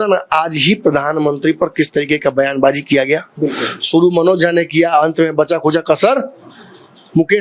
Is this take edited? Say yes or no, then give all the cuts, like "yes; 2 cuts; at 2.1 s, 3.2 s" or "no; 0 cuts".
no; 0 cuts